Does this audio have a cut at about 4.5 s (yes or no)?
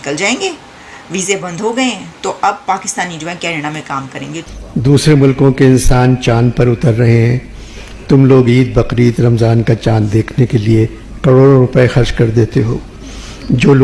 yes